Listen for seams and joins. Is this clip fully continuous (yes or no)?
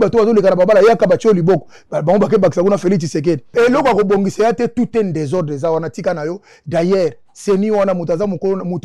no